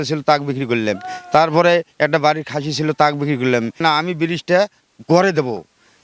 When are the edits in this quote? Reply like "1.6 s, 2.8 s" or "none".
3.8 s